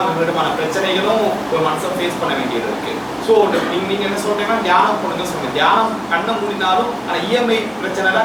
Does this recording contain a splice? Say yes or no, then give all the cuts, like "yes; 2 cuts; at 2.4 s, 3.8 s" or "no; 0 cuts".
no; 0 cuts